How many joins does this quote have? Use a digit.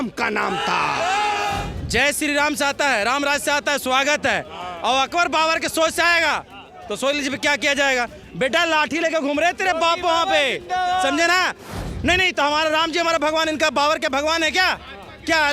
2